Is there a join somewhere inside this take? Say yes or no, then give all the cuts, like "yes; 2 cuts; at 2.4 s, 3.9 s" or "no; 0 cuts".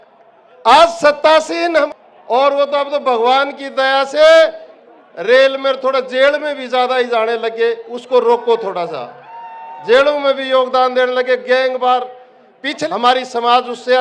yes; 2 cuts; at 1.9 s, 12.8 s